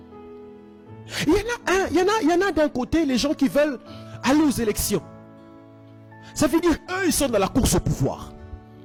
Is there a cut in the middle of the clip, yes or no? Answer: no